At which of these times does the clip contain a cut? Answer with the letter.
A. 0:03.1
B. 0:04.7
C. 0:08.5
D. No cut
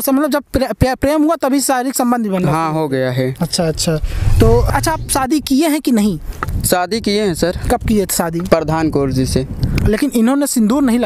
B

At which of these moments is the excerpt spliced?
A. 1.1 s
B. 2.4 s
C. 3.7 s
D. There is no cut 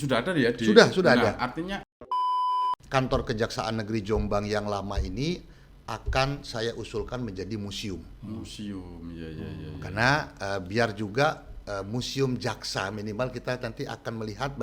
B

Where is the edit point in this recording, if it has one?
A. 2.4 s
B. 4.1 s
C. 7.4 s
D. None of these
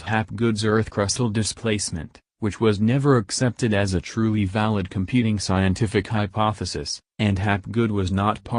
B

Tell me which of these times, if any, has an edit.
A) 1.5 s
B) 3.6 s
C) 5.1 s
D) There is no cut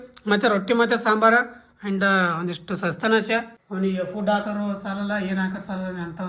B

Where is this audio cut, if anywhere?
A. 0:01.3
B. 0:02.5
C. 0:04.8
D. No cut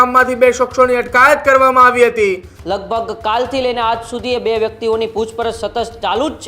B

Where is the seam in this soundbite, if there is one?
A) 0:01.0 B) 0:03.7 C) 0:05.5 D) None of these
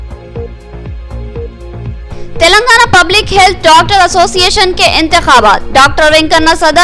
D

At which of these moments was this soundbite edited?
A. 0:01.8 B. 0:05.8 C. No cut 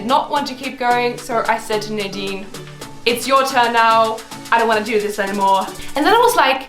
B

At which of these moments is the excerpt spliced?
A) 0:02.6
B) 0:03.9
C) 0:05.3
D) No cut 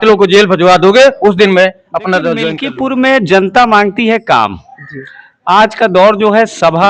A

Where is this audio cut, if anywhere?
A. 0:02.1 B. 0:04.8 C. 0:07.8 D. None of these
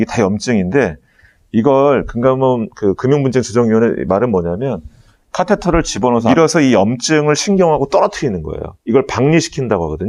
D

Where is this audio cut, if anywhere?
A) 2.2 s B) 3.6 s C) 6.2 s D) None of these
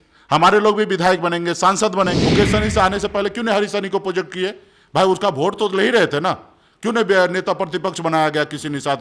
A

